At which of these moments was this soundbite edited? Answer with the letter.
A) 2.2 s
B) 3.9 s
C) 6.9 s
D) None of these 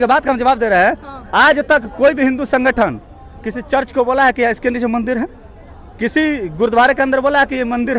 D